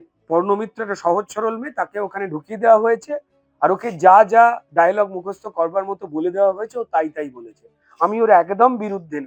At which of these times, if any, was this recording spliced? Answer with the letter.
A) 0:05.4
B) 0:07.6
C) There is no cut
C